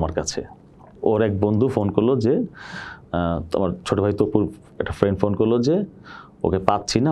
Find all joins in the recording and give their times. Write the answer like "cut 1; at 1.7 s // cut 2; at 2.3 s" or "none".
none